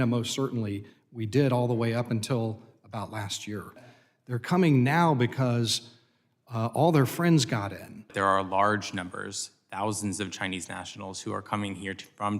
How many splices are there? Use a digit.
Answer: 2